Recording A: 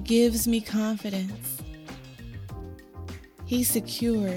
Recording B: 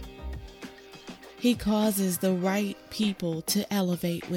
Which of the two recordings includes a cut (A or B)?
A